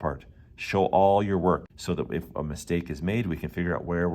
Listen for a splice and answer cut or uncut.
cut